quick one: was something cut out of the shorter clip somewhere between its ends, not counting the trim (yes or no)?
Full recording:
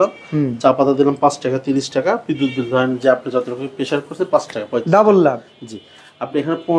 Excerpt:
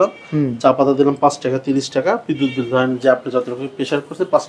no